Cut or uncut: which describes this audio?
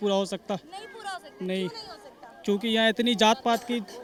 uncut